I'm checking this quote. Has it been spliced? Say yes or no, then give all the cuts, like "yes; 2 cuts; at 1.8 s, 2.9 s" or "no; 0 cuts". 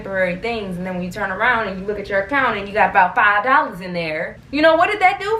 yes; 1 cut; at 4.3 s